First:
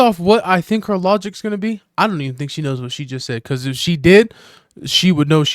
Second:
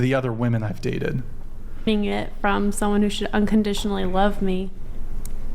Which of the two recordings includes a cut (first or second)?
second